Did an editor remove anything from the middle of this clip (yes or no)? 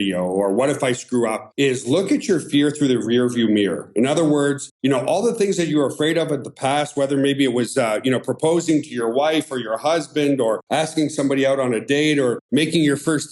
yes